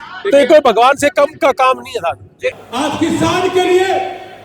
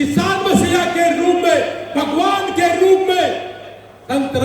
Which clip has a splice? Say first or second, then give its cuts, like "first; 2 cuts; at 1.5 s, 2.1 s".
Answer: first; 1 cut; at 2.5 s